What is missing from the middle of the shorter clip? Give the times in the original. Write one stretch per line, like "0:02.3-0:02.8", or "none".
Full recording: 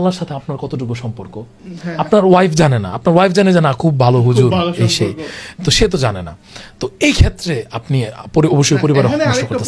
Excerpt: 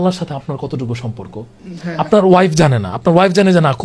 none